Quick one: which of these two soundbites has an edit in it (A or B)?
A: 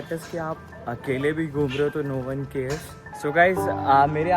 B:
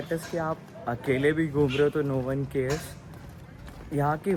A